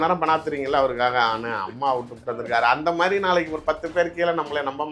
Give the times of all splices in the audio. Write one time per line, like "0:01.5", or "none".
none